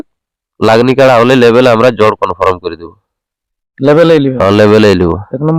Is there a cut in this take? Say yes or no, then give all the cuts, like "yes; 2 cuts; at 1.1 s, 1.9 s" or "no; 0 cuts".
no; 0 cuts